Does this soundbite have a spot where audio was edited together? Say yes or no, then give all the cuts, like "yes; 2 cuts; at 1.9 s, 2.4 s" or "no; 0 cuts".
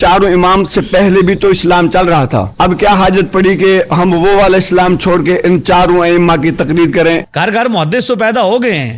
yes; 2 cuts; at 2.5 s, 7.2 s